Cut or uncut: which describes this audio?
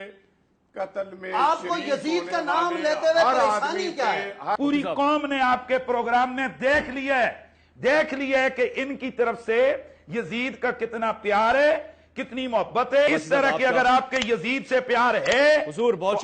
cut